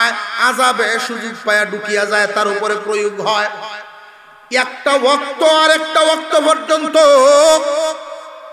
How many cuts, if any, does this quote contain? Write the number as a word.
zero